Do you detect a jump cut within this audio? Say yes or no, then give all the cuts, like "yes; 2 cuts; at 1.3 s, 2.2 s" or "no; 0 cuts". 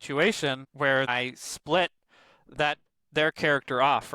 yes; 1 cut; at 1.1 s